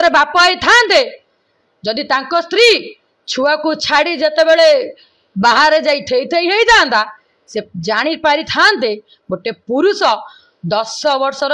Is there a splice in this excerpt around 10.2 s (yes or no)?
no